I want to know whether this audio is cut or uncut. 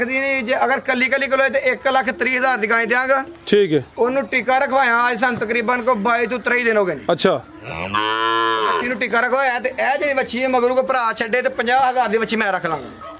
uncut